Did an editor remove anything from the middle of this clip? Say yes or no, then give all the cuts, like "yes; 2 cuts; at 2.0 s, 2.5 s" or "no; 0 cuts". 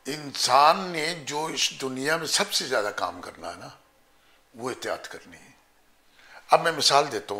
no; 0 cuts